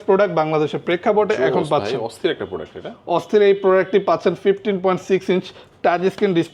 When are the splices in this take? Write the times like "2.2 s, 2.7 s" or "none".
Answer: none